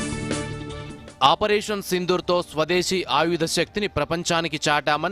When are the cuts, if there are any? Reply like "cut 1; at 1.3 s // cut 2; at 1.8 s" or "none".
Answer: cut 1; at 1.0 s

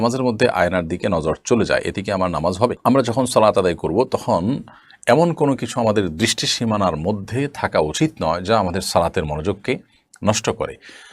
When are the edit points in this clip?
none

